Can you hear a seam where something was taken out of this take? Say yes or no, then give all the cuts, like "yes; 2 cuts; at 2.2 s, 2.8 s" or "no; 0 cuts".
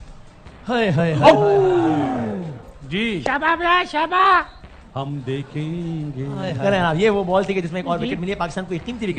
no; 0 cuts